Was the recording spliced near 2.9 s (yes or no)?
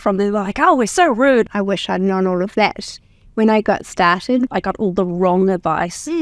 no